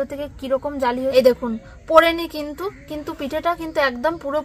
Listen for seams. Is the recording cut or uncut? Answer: cut